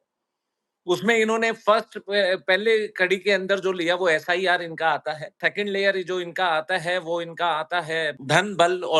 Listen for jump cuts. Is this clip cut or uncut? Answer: cut